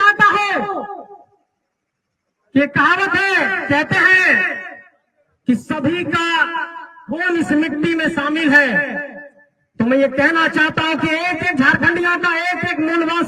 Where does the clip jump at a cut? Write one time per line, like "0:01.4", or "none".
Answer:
none